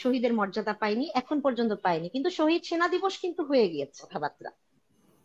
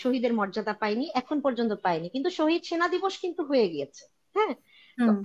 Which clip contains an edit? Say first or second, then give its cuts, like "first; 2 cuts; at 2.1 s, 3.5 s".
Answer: first; 1 cut; at 4.1 s